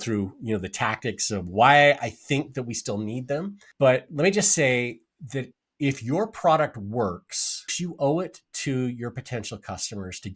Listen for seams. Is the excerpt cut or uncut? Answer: cut